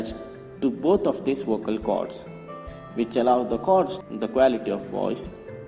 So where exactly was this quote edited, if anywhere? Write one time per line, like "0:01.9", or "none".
none